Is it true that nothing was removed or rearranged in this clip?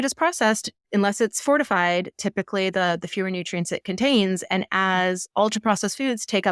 yes; 0 cuts

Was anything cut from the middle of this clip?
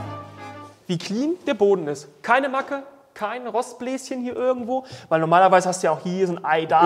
no; 0 cuts

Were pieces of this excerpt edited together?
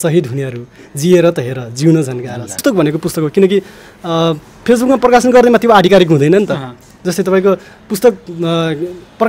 yes; 1 cut; at 2.6 s

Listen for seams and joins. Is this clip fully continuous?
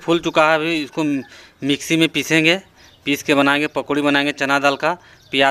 yes; 0 cuts

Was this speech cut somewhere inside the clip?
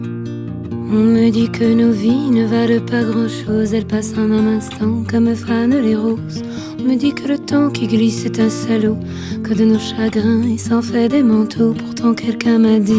no; 0 cuts

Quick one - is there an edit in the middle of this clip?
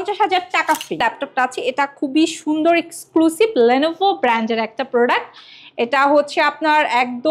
yes; 1 cut; at 1.0 s

